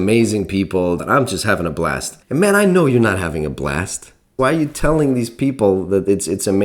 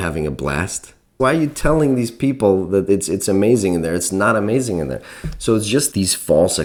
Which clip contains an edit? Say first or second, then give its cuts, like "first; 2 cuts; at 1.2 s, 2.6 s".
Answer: first; 2 cuts; at 1.0 s, 2.1 s